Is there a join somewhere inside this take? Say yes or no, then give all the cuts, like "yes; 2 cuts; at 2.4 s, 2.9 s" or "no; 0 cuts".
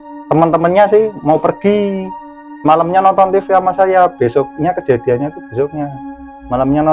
no; 0 cuts